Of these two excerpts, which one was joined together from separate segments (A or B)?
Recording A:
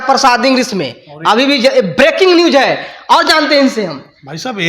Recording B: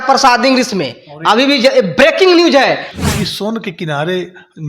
B